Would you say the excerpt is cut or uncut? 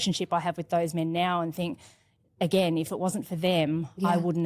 uncut